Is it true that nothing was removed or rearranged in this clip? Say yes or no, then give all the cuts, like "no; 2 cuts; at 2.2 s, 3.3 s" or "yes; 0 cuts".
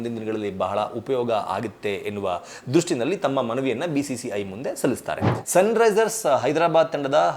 no; 1 cut; at 5.3 s